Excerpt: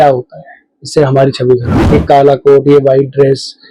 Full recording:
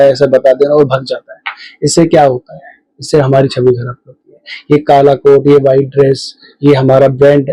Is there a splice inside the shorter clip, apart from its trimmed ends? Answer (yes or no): yes